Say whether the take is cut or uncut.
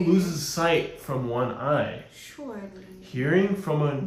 uncut